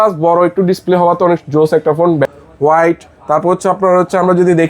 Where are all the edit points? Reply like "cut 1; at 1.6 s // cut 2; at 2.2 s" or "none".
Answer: cut 1; at 2.3 s

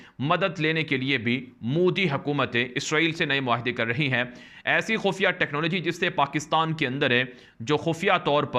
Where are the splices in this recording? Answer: none

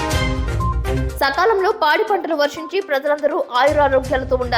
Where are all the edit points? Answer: cut 1; at 1.0 s

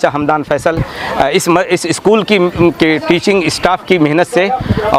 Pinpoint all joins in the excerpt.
none

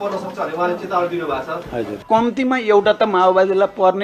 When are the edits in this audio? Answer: cut 1; at 1.9 s

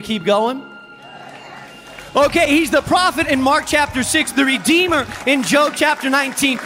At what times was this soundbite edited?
cut 1; at 3.2 s // cut 2; at 5.4 s

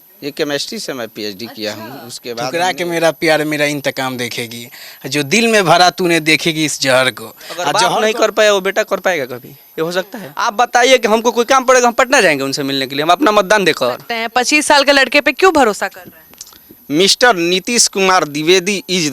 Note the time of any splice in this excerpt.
cut 1; at 2.5 s // cut 2; at 7.7 s // cut 3; at 10.2 s // cut 4; at 14.2 s

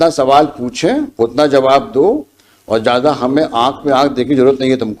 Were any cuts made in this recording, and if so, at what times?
none

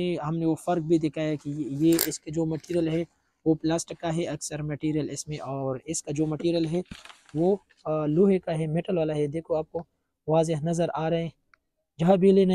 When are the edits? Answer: none

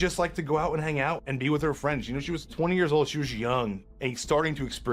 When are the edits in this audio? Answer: cut 1; at 1.2 s // cut 2; at 2.5 s // cut 3; at 3.8 s

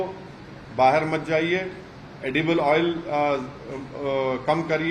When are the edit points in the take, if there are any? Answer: none

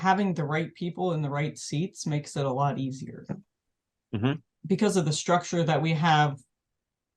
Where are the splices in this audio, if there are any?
cut 1; at 4.5 s

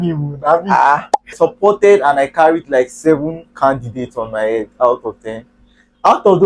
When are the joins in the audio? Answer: cut 1; at 1.4 s

